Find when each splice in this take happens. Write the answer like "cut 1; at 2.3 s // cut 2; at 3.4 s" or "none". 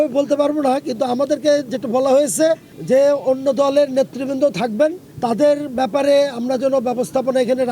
cut 1; at 2.7 s // cut 2; at 5.1 s